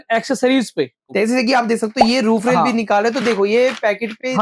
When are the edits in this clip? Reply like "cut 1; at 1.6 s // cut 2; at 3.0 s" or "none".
cut 1; at 1.1 s